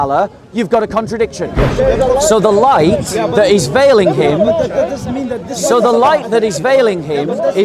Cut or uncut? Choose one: cut